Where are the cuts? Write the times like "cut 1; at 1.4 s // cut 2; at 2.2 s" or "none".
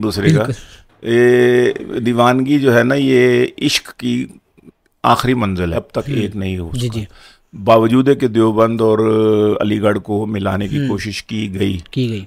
cut 1; at 5.8 s